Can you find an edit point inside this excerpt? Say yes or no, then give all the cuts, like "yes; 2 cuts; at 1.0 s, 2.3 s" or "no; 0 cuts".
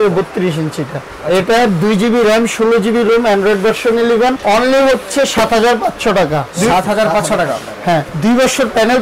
yes; 4 cuts; at 1.1 s, 4.4 s, 6.5 s, 8.1 s